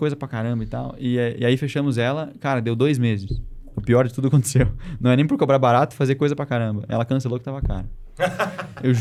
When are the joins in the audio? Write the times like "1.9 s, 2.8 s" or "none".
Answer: none